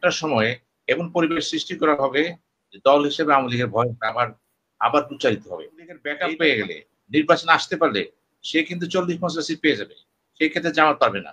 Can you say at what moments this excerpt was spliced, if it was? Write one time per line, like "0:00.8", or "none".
0:06.2